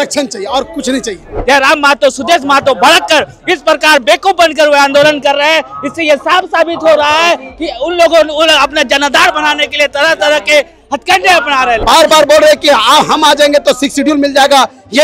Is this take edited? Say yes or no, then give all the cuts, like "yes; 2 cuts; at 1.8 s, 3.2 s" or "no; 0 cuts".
yes; 2 cuts; at 1.3 s, 11.8 s